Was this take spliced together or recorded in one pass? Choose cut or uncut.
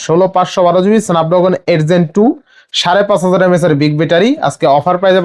uncut